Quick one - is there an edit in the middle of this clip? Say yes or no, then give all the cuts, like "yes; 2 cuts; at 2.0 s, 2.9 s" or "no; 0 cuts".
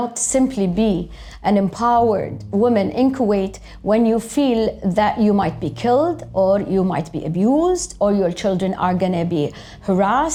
no; 0 cuts